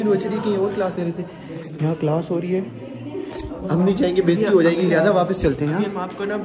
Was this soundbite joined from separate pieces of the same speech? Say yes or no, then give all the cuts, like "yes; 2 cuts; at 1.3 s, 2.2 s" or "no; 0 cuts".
no; 0 cuts